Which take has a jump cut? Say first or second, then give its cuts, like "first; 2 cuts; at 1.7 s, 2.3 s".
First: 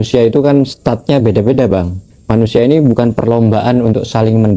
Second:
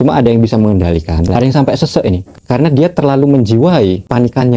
second; 2 cuts; at 1.4 s, 2.3 s